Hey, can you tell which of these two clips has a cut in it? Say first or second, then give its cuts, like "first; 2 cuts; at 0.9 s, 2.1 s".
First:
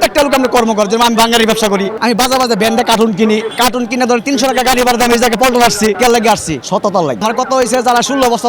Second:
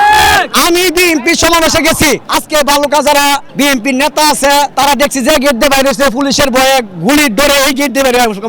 first; 1 cut; at 7.2 s